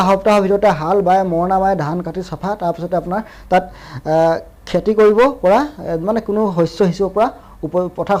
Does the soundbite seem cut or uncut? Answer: uncut